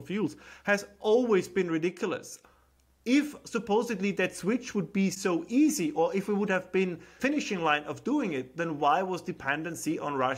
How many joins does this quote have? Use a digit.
2